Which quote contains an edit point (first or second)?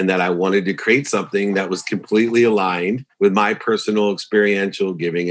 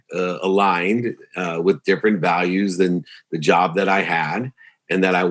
first